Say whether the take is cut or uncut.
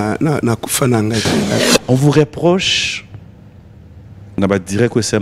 cut